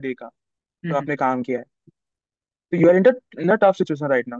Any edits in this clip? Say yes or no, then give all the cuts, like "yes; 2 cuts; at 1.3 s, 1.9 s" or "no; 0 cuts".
no; 0 cuts